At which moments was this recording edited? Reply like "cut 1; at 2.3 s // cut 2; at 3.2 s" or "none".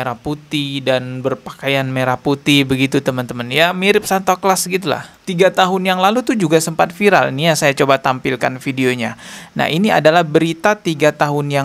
cut 1; at 5.2 s